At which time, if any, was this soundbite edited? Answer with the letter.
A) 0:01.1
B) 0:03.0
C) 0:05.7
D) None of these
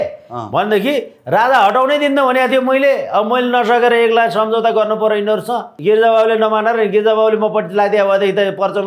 C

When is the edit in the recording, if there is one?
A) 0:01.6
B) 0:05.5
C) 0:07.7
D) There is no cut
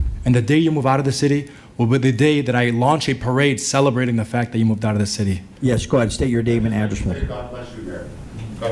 B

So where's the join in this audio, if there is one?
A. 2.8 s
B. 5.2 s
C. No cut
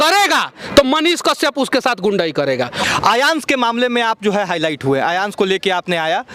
A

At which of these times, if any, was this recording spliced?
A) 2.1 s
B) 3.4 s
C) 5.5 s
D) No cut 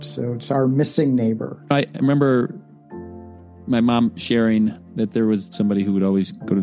C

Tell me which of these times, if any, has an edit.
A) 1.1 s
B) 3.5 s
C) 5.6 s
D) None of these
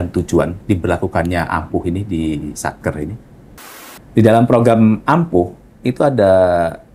B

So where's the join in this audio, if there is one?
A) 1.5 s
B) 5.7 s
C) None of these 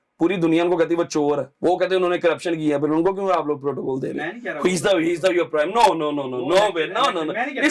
A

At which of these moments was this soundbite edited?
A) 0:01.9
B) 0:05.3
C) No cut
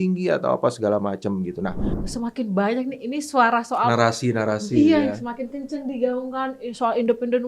A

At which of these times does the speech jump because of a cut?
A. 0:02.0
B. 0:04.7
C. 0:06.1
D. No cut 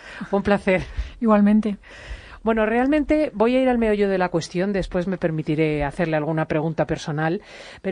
B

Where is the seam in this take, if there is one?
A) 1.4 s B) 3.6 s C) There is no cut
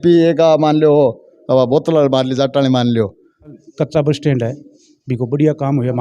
B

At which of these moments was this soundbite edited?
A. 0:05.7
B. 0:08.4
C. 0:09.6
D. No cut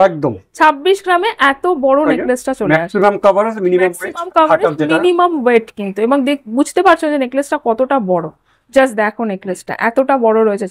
D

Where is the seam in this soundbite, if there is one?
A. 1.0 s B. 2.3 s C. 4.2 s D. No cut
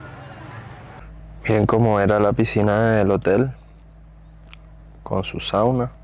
A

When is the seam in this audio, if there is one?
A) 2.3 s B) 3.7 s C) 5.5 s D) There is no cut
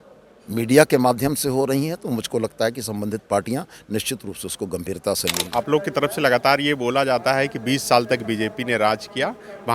C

